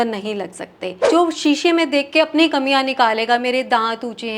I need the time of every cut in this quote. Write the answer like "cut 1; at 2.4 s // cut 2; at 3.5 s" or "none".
cut 1; at 1.1 s